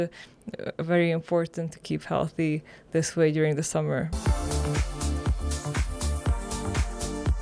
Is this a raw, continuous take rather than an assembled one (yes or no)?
no